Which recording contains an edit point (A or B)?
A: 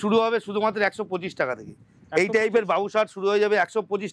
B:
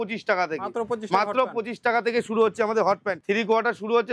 B